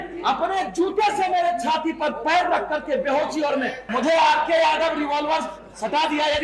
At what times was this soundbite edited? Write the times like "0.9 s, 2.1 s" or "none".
3.8 s